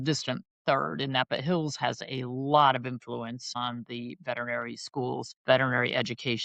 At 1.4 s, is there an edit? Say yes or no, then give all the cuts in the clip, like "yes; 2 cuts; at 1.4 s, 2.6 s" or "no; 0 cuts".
no; 2 cuts; at 3.6 s, 5.3 s